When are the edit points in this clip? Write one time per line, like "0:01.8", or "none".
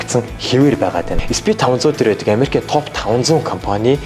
0:01.1